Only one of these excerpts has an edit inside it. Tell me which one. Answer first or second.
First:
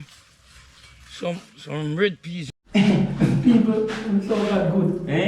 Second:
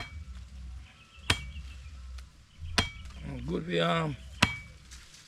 first